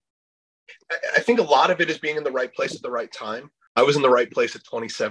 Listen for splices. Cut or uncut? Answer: cut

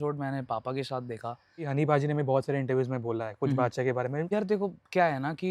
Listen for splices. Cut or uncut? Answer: cut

